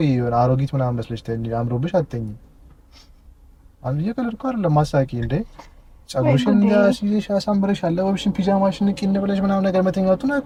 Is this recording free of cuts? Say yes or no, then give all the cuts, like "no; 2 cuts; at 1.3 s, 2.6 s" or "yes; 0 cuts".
yes; 0 cuts